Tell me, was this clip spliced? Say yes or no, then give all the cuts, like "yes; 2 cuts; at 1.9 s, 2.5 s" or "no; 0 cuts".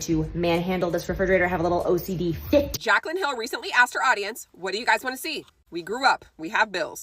yes; 1 cut; at 2.7 s